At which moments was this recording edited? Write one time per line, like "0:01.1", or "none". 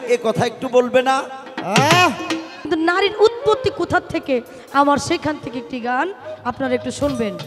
0:02.7